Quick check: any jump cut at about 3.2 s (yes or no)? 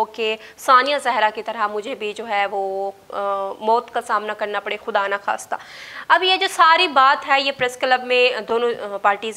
no